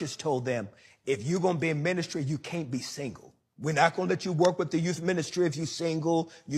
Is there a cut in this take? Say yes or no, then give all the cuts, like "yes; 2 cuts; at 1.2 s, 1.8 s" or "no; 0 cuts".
yes; 2 cuts; at 3.8 s, 4.9 s